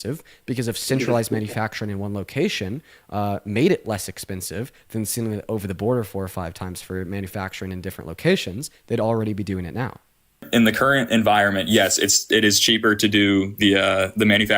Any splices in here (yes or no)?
yes